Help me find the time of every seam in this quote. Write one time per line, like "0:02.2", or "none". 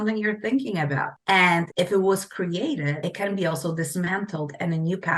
0:01.1
0:01.7
0:03.0